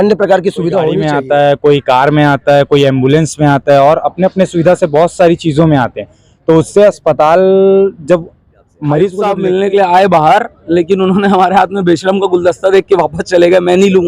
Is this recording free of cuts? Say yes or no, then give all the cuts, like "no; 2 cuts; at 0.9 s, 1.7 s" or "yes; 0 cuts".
no; 2 cuts; at 1.0 s, 9.2 s